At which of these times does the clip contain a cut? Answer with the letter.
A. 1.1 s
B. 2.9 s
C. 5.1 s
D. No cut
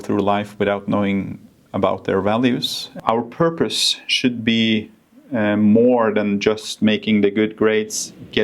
B